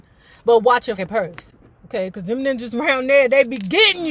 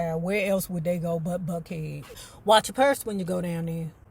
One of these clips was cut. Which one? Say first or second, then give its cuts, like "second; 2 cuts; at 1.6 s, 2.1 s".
first; 1 cut; at 1.0 s